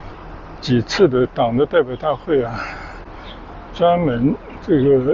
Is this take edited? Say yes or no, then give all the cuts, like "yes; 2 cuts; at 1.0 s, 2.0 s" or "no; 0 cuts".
no; 0 cuts